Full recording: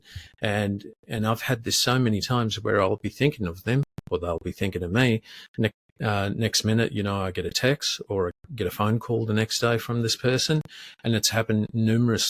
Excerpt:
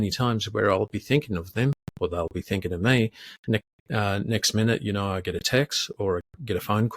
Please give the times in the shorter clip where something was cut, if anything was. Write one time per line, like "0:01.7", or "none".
none

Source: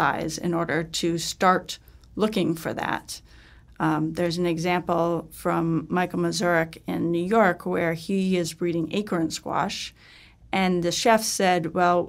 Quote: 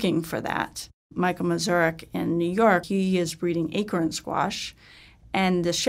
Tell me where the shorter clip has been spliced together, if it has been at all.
0:01.1
0:02.8

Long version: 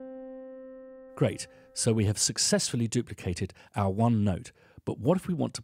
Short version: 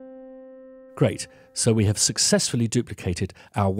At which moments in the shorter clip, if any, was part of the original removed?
0:00.9

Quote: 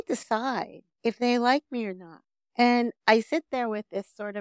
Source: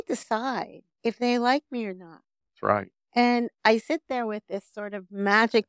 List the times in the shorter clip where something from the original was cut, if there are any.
0:02.4

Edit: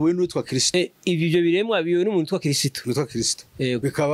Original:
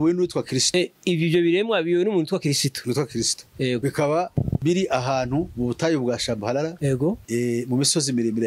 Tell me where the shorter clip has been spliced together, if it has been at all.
none

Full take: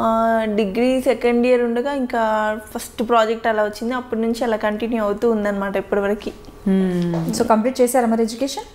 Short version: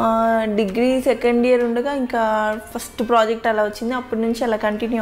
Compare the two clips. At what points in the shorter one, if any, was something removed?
none

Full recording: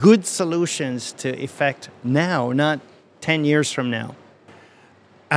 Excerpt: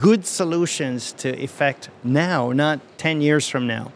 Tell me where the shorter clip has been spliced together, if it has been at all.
0:02.9

